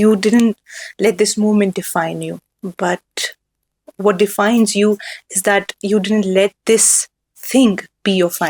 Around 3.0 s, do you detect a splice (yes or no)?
no